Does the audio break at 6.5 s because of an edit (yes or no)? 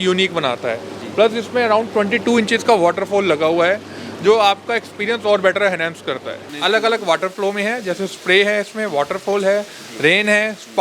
yes